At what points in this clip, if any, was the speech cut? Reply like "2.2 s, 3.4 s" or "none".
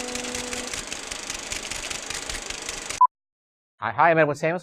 2.2 s